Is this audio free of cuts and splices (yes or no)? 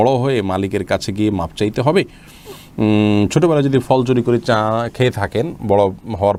yes